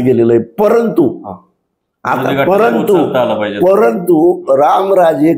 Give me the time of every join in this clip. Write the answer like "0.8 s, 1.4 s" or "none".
none